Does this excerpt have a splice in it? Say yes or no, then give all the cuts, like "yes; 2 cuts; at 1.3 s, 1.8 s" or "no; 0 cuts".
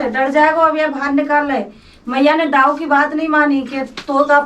no; 0 cuts